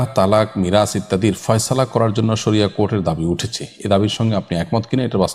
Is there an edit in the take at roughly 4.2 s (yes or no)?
no